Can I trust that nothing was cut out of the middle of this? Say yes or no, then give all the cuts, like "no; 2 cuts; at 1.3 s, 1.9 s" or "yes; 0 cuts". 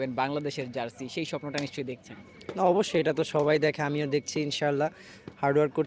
yes; 0 cuts